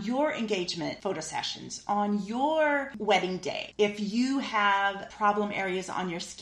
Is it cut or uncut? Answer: cut